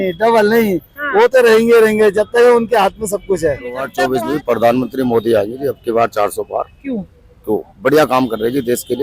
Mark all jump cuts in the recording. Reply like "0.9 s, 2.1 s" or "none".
3.9 s